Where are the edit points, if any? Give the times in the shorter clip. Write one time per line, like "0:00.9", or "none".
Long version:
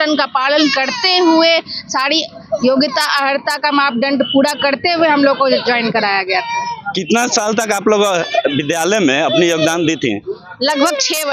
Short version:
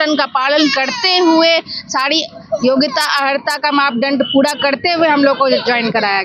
none

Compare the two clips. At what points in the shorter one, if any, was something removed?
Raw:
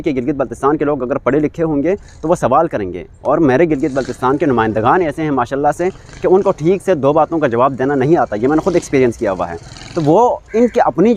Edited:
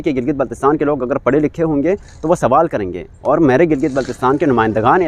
none

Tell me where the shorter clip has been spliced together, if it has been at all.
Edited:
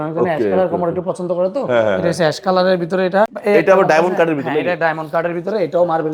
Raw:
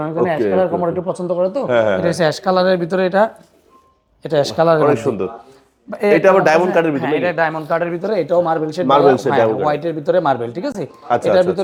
0:03.4

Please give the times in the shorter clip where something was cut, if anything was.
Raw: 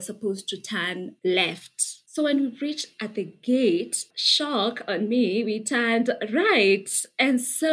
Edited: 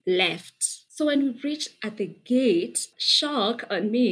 none

